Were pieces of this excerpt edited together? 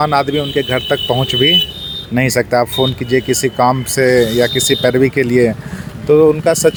no; 0 cuts

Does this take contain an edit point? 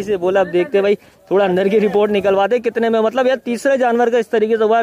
no; 0 cuts

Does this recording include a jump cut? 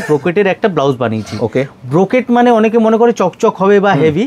no; 0 cuts

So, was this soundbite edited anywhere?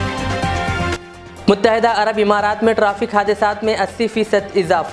no; 0 cuts

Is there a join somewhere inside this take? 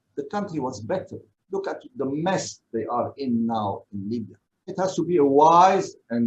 no; 0 cuts

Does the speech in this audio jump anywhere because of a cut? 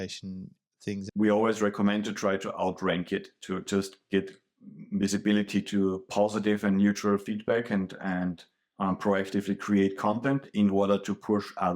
yes; 1 cut; at 1.0 s

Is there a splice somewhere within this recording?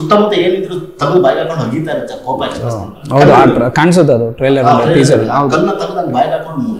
no; 0 cuts

